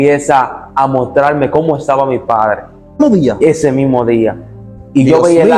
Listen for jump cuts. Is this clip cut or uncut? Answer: cut